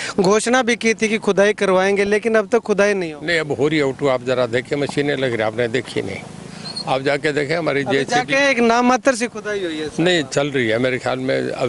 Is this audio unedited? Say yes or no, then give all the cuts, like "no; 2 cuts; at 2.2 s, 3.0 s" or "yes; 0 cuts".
yes; 0 cuts